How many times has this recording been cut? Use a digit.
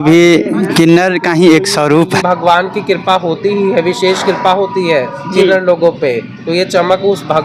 1